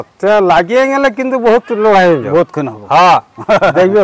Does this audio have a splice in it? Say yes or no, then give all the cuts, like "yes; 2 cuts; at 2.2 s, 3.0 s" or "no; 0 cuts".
no; 0 cuts